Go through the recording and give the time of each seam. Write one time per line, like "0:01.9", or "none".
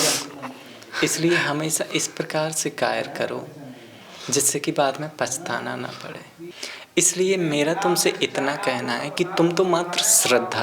0:06.4

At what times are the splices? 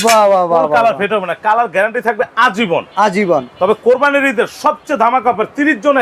none

